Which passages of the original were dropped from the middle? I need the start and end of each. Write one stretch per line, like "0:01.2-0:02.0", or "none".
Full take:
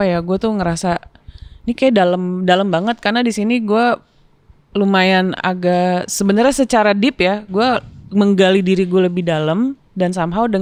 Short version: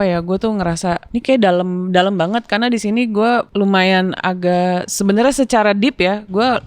0:01.0-0:01.6
0:04.0-0:04.7

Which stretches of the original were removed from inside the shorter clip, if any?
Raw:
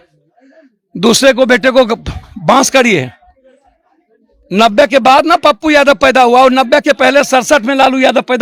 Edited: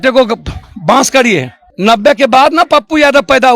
0:03.2-0:04.3

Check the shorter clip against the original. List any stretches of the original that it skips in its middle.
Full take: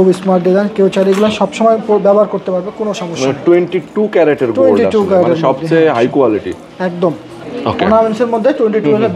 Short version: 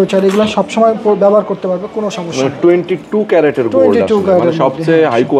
none

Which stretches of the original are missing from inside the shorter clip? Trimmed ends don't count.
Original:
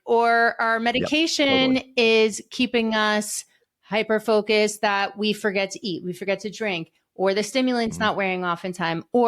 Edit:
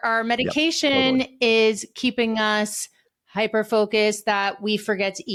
none

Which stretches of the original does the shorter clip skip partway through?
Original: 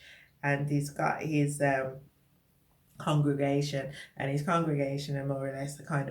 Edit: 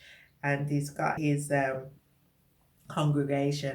0:01.2-0:01.3

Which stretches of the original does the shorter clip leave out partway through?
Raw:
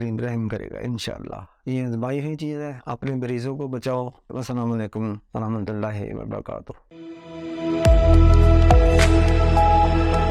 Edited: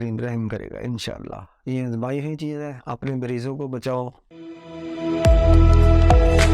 0:04.2-0:06.8

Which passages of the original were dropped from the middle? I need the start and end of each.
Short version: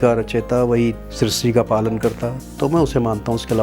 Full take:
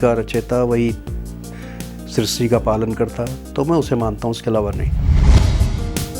0:01.0-0:02.0

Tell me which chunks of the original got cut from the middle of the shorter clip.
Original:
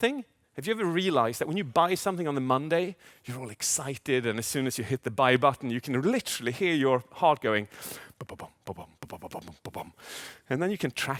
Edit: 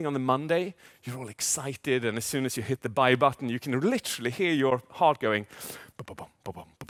none

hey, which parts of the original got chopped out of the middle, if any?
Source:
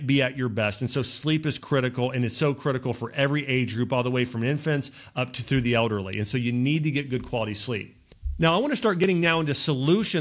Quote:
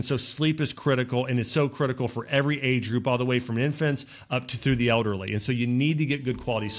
none

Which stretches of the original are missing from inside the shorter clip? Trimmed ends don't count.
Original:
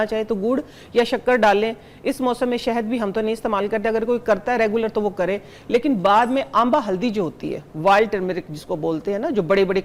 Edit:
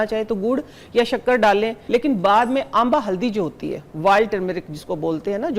0:01.8-0:05.6

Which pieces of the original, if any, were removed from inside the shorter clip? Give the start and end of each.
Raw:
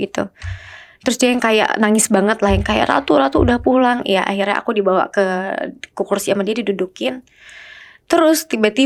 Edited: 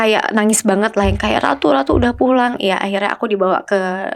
none

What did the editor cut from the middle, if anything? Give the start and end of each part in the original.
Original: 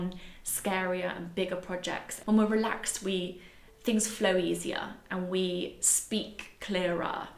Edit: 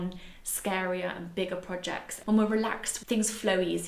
0:02.9-0:03.6

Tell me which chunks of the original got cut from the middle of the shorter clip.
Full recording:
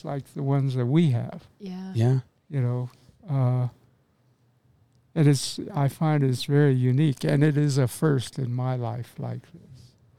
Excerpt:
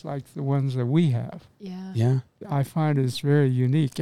0:02.3-0:05.6

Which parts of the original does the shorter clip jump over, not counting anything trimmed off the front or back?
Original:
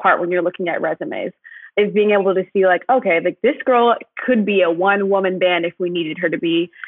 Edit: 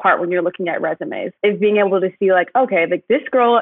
0:01.3-0:01.6

